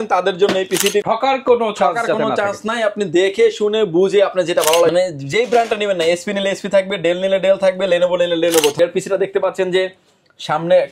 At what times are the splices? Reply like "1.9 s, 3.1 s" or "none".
1.0 s, 4.9 s, 8.8 s